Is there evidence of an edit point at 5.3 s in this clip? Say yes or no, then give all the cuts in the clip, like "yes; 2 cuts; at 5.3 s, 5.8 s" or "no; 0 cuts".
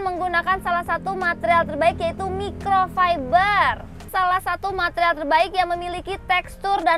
no; 1 cut; at 4.0 s